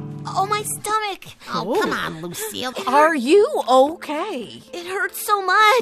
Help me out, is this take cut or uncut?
cut